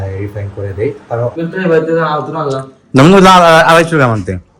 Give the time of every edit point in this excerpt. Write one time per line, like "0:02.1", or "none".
0:01.4